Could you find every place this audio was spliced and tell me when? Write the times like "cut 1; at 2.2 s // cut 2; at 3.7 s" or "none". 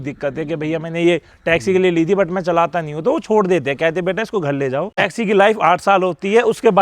cut 1; at 5.0 s